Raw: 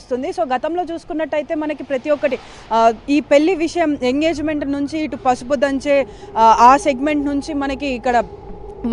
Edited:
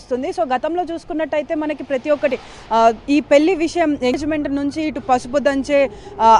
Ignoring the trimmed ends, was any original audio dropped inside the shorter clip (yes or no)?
yes